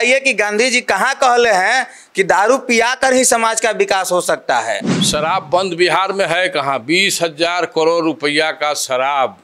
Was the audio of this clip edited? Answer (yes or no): yes